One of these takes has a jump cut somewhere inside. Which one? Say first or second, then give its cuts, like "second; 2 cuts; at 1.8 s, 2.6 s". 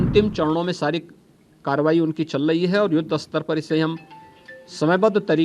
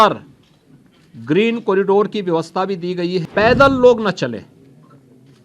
second; 1 cut; at 3.2 s